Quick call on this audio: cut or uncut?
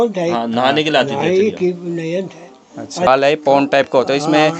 cut